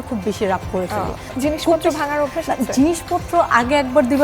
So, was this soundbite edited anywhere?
yes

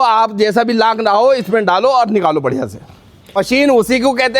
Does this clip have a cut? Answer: yes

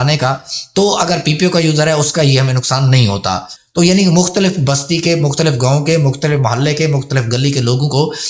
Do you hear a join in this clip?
yes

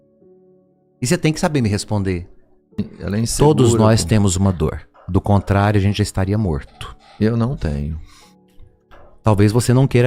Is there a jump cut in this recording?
yes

